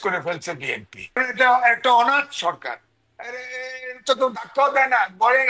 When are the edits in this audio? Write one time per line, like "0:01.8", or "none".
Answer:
0:01.2